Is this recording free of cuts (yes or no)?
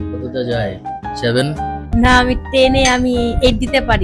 no